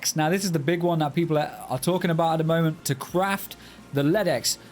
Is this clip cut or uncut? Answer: cut